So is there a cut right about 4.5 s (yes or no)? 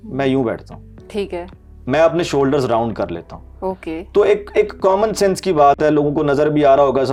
no